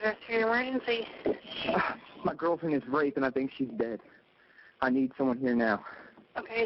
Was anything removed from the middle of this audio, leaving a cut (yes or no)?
yes